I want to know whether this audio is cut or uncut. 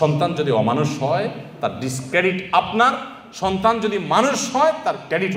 uncut